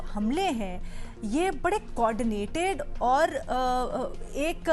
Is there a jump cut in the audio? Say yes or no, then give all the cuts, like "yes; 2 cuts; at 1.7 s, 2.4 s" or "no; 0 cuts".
no; 0 cuts